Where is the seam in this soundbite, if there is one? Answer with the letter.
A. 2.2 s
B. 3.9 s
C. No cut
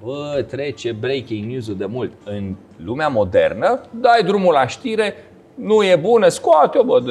C